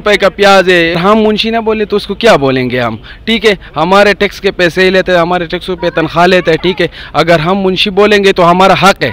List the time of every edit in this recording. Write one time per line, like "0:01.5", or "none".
0:01.0

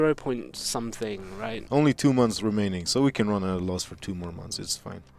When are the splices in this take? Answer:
0:01.6

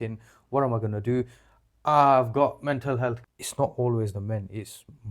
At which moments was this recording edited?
0:03.3

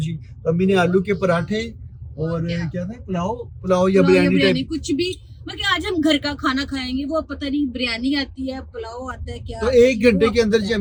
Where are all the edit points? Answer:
none

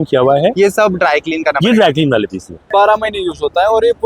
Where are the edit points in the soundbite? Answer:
0:02.7

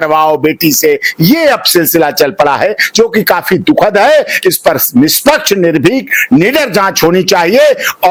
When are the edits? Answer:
none

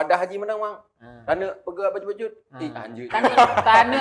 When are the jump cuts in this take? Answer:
none

